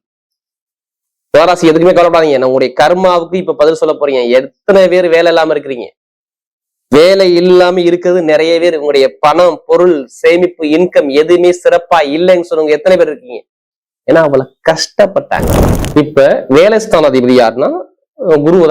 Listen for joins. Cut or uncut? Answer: cut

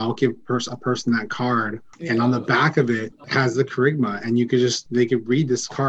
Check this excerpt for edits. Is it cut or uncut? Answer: cut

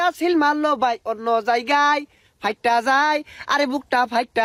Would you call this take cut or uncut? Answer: uncut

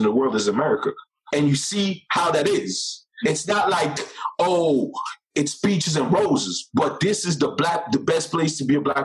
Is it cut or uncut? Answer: cut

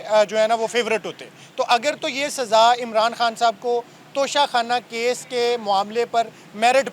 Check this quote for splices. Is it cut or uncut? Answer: uncut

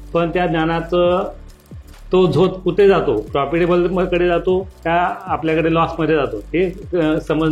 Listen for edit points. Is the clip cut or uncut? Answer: uncut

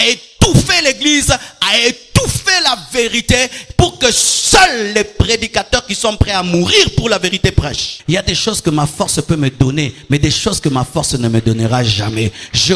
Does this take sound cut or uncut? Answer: cut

